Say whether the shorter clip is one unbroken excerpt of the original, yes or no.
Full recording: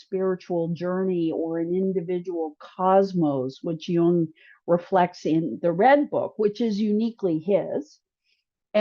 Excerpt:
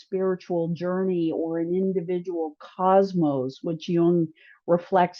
yes